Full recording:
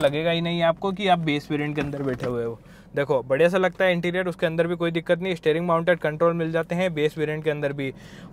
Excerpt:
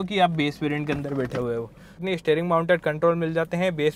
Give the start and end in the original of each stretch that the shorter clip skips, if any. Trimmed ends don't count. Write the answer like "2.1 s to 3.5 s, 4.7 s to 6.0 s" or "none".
2.9 s to 5.2 s